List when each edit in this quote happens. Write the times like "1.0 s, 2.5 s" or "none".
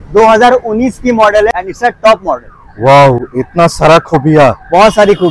1.5 s